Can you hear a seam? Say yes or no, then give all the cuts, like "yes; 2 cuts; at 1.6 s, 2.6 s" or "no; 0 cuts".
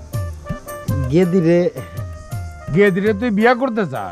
no; 0 cuts